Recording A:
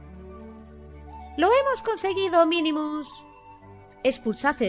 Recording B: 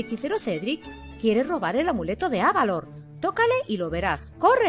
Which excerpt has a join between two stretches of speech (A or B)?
A